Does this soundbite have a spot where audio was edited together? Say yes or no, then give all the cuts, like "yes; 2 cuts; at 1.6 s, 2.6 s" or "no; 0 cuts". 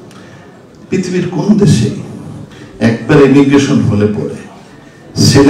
no; 0 cuts